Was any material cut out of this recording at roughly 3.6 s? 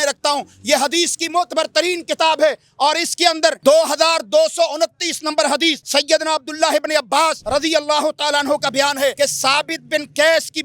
yes; 4 cuts; at 3.6 s, 5.8 s, 7.4 s, 9.1 s

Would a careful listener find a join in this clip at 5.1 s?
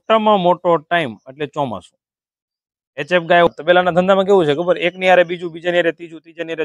no; 1 cut; at 3.5 s

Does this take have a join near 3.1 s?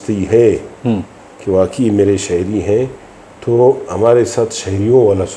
no; 0 cuts

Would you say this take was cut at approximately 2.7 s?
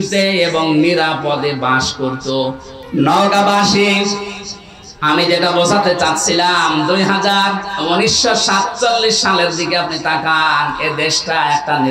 yes; 1 cut; at 2.7 s

